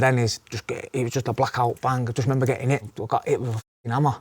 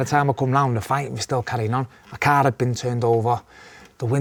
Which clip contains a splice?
first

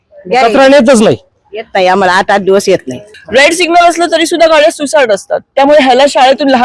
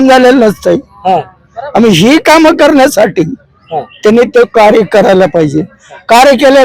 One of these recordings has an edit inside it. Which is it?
first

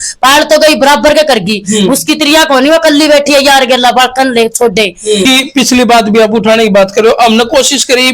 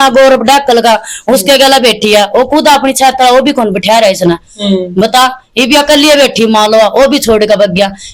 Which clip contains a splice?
first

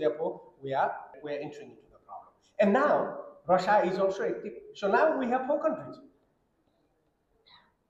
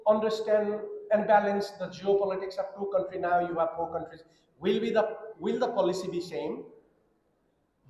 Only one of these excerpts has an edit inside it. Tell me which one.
first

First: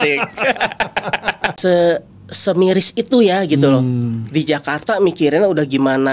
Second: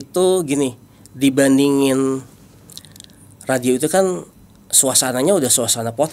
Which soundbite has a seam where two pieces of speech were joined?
first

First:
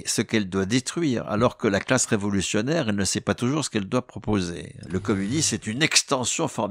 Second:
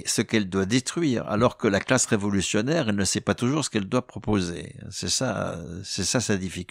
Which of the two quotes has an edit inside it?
first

